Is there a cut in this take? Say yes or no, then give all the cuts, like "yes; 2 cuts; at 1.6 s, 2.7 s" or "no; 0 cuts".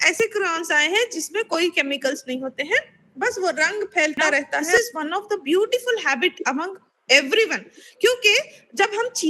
yes; 1 cut; at 4.6 s